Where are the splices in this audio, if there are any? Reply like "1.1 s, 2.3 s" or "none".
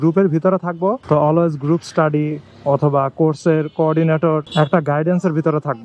1.0 s, 4.5 s